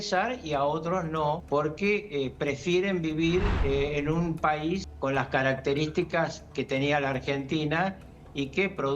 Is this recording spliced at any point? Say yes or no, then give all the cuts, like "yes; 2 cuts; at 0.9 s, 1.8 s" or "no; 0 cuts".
yes; 3 cuts; at 1.4 s, 3.5 s, 4.9 s